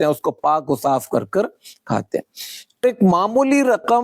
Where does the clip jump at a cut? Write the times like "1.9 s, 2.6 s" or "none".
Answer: 2.8 s